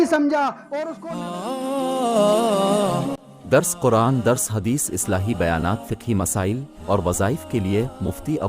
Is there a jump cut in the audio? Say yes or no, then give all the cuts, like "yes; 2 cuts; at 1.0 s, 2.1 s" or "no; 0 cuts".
yes; 1 cut; at 1.0 s